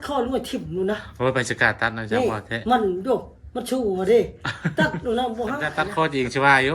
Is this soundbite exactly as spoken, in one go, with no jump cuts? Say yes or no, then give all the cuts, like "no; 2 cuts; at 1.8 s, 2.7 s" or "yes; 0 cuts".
no; 1 cut; at 5.8 s